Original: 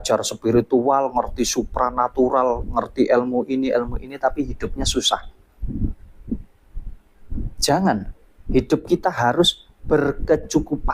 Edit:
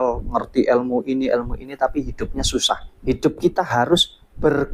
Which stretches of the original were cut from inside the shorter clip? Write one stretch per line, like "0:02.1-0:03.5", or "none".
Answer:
0:05.3-0:08.4